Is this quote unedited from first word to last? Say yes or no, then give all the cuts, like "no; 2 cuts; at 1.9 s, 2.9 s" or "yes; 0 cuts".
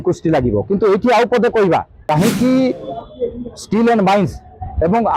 no; 1 cut; at 1.9 s